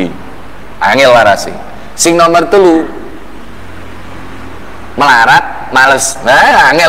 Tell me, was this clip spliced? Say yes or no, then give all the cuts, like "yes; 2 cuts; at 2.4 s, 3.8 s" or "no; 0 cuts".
no; 0 cuts